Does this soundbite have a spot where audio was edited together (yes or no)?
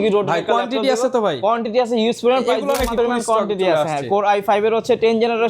yes